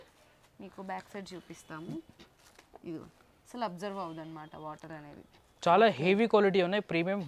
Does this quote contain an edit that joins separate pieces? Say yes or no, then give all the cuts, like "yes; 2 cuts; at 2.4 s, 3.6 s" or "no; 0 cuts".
no; 0 cuts